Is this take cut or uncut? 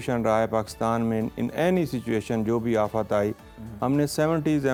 uncut